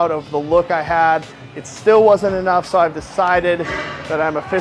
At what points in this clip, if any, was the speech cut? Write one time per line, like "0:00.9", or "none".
none